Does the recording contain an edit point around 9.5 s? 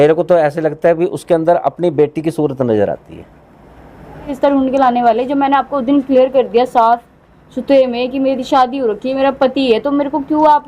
no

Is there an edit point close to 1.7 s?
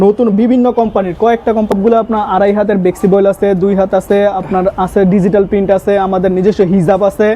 yes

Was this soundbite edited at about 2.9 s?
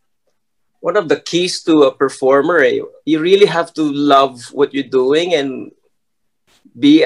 yes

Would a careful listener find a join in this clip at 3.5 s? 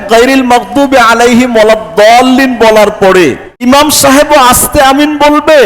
yes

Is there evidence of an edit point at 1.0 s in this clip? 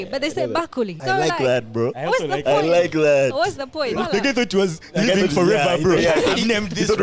yes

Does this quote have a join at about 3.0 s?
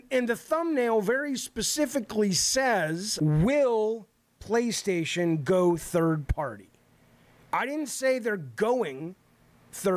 yes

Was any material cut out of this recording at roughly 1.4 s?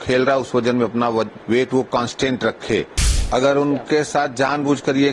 yes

